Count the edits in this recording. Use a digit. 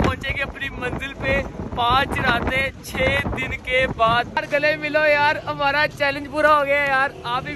1